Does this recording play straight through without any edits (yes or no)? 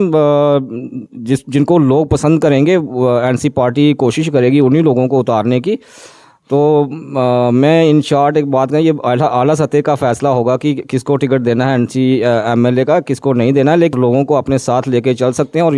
yes